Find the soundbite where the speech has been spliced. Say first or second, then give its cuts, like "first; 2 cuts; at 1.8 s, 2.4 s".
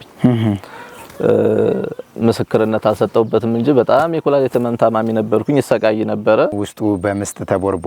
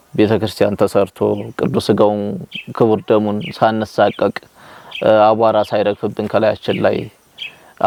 first; 1 cut; at 6.6 s